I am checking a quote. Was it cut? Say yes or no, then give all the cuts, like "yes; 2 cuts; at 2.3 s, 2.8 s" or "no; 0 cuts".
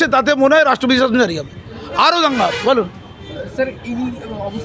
no; 0 cuts